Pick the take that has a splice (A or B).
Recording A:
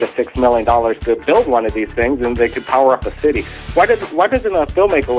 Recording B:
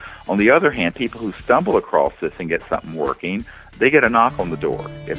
A